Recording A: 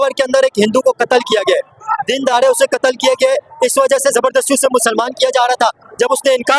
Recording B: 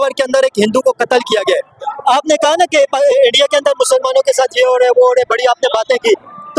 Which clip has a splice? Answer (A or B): B